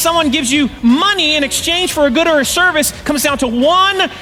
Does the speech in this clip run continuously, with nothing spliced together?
yes; 0 cuts

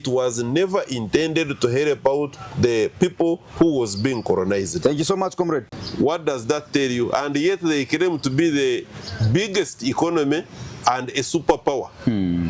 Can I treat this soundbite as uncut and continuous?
no; 1 cut; at 5.7 s

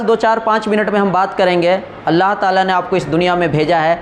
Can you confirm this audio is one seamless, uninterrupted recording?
yes; 0 cuts

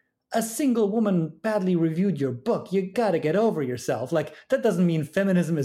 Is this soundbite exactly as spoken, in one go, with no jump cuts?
no; 1 cut; at 2.9 s

